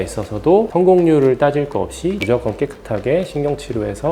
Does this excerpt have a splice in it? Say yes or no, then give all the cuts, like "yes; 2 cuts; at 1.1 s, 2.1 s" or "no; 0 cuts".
yes; 1 cut; at 2.2 s